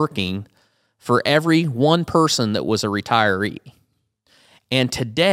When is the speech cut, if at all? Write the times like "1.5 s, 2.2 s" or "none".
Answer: none